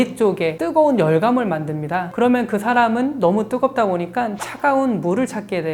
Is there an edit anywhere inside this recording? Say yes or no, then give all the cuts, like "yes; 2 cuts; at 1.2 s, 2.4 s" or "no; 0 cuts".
no; 0 cuts